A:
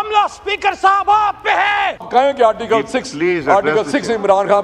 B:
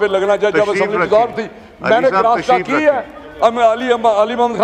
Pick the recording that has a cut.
A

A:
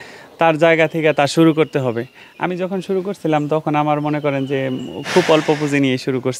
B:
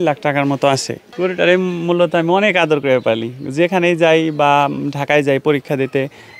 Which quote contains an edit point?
B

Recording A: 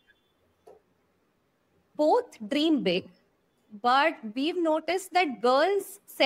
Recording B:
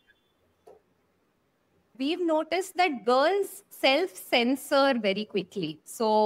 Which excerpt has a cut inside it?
B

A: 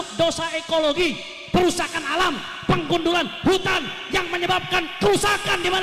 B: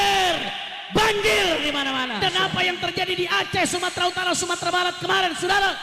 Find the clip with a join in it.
B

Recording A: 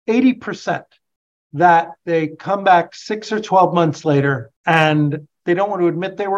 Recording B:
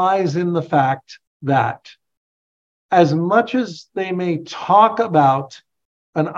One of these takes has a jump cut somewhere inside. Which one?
A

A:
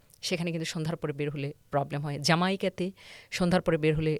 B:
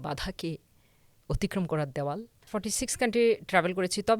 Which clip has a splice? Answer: B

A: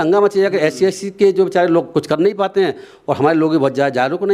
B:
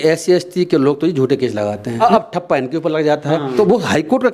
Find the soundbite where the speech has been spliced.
B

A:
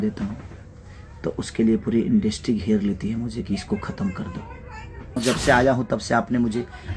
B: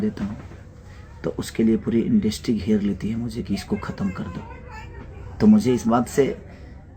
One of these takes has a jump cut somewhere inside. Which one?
A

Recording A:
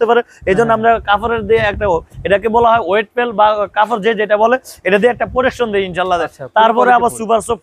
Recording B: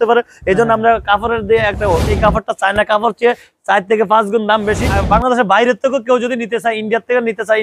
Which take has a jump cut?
B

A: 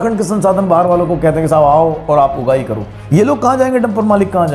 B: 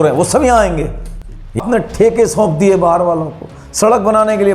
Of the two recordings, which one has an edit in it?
B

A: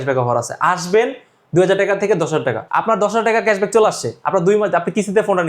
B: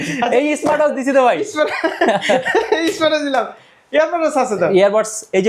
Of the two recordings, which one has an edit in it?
A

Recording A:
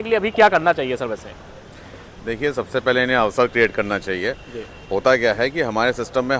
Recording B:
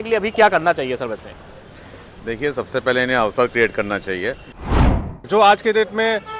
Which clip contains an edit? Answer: B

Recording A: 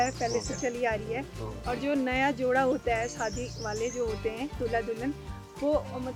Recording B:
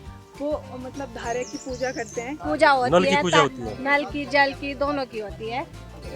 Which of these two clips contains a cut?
B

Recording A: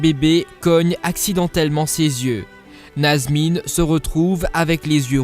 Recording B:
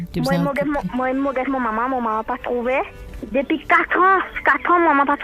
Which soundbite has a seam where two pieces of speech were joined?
A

